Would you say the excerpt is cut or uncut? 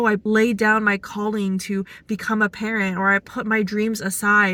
uncut